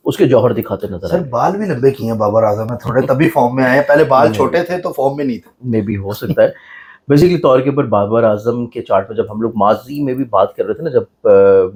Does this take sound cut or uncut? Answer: uncut